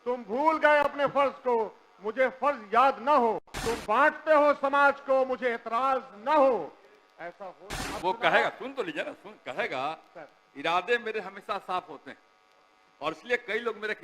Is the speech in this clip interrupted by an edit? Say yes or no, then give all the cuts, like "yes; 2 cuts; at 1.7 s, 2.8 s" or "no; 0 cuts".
yes; 2 cuts; at 3.5 s, 7.7 s